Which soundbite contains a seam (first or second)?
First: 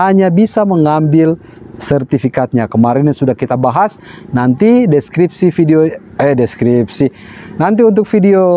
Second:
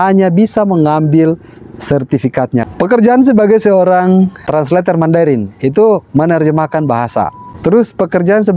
second